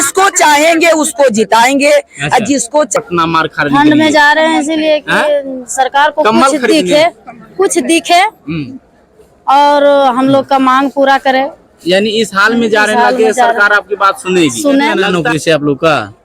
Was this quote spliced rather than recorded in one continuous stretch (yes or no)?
yes